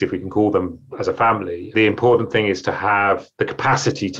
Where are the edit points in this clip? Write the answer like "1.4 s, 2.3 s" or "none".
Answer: none